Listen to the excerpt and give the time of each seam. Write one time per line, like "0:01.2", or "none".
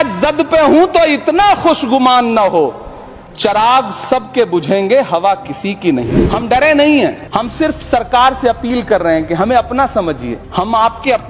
0:06.0
0:07.2
0:10.4